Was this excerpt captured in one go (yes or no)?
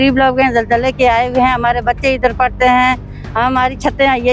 yes